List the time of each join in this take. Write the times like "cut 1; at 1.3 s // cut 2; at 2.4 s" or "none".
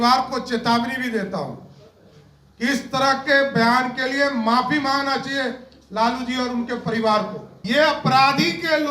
cut 1; at 7.5 s